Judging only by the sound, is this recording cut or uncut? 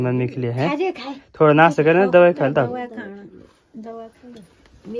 uncut